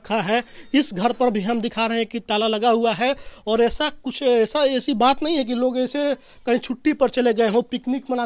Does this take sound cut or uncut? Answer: uncut